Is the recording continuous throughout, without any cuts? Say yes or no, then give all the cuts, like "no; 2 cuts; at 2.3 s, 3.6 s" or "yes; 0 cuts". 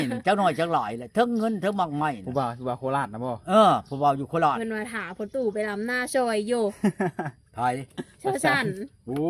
no; 1 cut; at 4.6 s